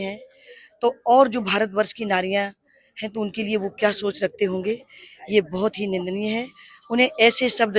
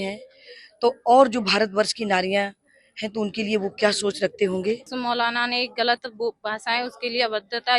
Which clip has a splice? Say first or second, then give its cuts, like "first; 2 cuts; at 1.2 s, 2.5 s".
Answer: second; 1 cut; at 4.9 s